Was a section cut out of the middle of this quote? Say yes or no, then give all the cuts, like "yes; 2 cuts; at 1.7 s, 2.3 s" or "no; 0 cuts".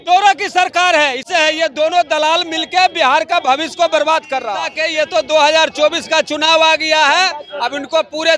yes; 2 cuts; at 1.2 s, 4.8 s